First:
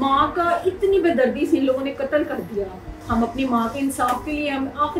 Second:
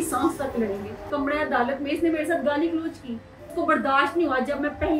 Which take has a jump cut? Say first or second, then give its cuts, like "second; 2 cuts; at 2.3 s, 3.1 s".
second; 2 cuts; at 1.1 s, 3.4 s